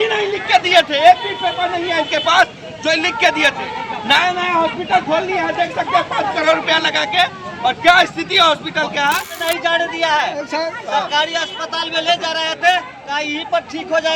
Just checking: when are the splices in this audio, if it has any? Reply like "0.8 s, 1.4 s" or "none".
9.4 s